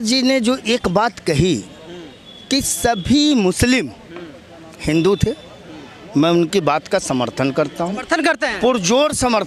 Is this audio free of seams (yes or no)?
yes